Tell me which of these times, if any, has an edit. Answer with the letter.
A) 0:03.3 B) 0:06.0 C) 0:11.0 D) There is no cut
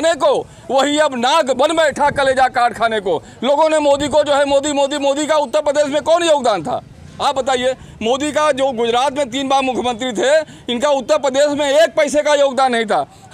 D